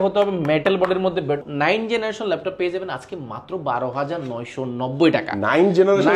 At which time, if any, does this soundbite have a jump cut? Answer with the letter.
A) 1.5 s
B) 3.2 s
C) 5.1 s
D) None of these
A